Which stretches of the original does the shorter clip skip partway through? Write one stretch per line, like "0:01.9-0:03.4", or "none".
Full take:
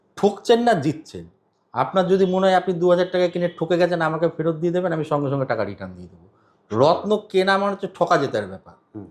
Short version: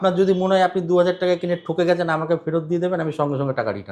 none